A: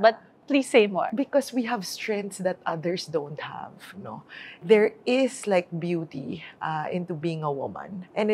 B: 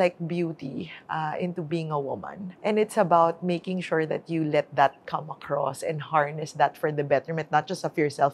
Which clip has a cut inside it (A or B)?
A